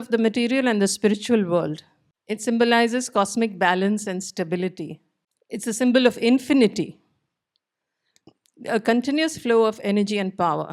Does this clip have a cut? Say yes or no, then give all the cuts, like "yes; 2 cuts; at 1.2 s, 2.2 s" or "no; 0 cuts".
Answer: no; 0 cuts